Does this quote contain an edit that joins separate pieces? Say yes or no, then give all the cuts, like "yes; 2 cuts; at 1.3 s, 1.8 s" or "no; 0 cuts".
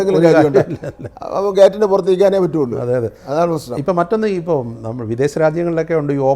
no; 0 cuts